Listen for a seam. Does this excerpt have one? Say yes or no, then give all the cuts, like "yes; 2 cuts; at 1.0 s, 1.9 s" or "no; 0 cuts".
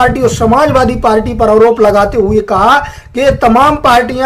no; 0 cuts